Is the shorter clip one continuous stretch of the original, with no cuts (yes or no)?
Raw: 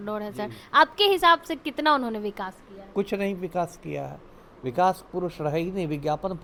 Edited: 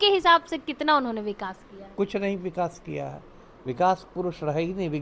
yes